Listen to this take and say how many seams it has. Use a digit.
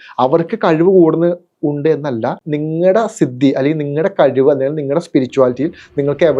1